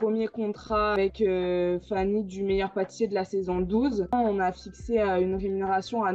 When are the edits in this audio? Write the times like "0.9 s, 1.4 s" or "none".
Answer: 1.0 s, 4.1 s